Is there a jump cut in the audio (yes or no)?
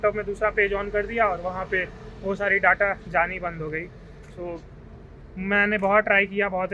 no